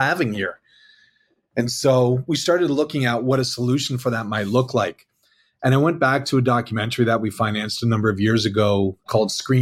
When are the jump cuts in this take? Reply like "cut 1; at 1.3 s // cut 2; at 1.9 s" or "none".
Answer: none